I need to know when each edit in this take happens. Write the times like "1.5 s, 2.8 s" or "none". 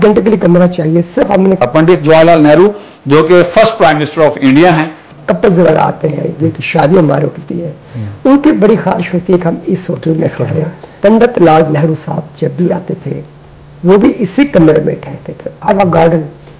1.6 s, 5.1 s, 10.8 s, 15.7 s